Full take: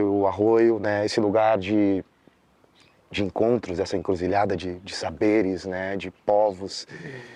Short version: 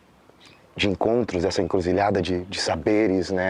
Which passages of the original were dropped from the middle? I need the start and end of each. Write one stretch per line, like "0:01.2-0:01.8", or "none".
none